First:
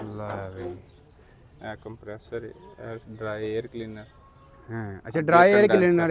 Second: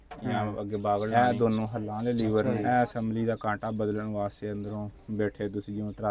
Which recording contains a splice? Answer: second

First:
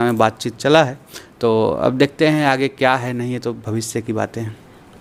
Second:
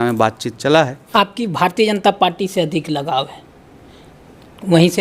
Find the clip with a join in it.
second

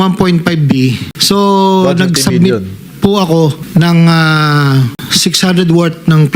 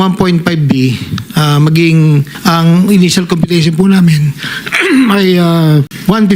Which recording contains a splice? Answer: first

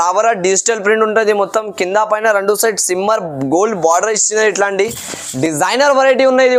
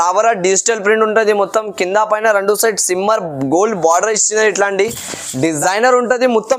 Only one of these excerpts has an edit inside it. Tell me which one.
second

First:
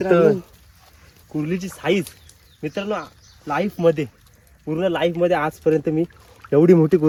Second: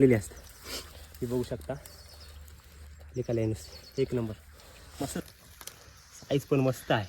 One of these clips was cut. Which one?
second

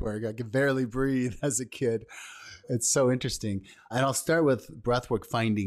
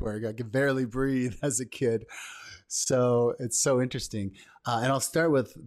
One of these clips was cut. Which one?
first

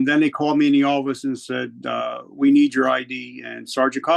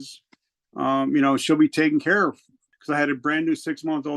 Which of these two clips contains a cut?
second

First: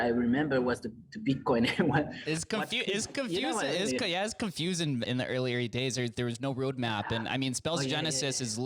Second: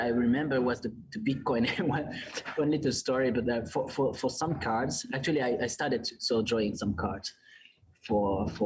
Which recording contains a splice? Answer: first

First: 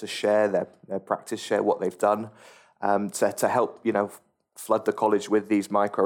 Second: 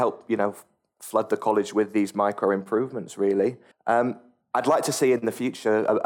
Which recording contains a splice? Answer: second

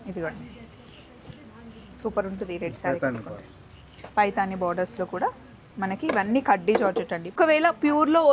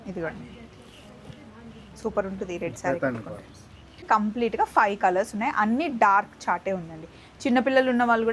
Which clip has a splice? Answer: second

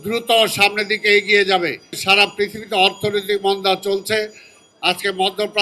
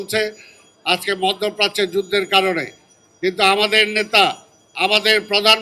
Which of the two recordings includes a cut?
first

